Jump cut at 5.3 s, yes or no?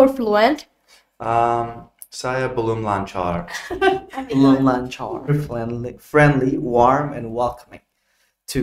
yes